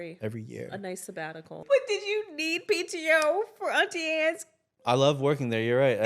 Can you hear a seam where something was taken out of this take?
yes; 1 cut; at 1.6 s

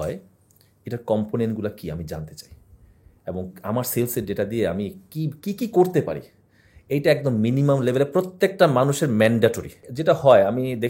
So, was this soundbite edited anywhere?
yes; 1 cut; at 9.9 s

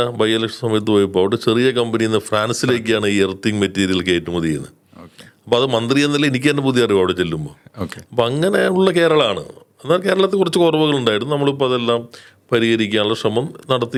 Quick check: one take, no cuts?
yes; 0 cuts

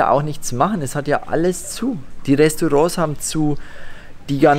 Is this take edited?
no; 0 cuts

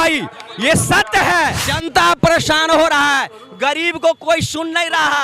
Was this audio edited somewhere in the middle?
yes; 1 cut; at 1.7 s

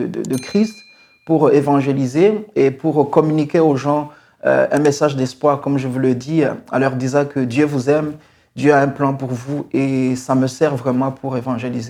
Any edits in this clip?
no; 0 cuts

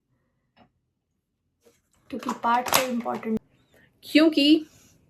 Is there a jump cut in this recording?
yes; 1 cut; at 3.4 s

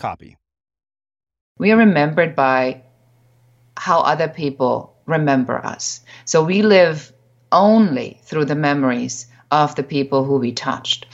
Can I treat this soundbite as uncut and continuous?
no; 1 cut; at 1.5 s

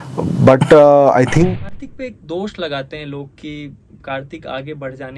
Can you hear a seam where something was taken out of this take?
yes; 1 cut; at 1.6 s

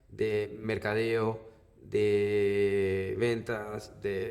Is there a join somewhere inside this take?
no; 0 cuts

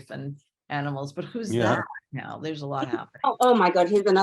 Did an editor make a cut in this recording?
yes; 1 cut; at 3.1 s

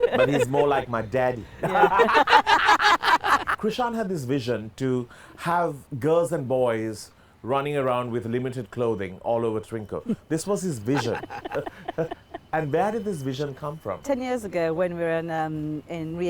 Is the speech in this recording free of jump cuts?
no; 3 cuts; at 3.6 s, 5.9 s, 14.0 s

